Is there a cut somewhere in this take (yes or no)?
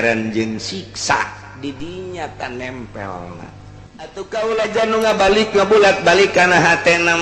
yes